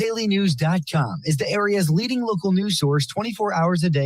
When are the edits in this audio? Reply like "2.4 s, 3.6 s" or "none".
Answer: none